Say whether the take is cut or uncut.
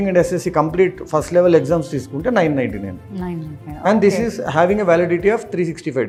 uncut